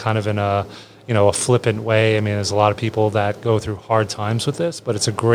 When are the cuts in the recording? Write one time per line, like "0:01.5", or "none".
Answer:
none